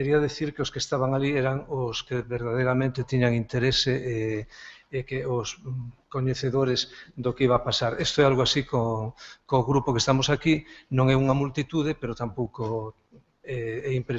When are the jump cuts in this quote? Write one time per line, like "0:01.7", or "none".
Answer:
none